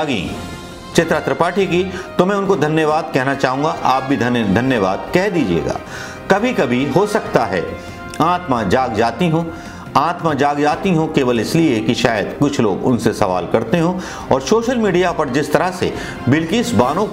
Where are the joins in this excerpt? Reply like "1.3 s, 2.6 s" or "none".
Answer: none